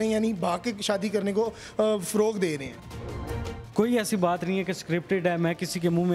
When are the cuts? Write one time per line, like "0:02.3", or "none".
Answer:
0:03.0